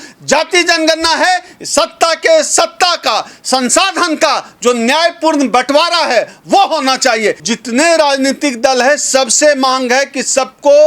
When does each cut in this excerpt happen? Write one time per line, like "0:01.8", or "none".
0:07.5